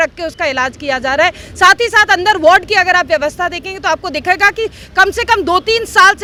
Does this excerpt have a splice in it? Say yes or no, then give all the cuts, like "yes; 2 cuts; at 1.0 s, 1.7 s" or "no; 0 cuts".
no; 0 cuts